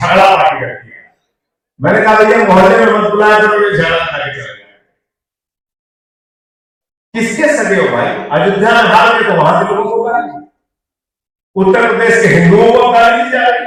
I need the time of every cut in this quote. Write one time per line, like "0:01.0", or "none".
none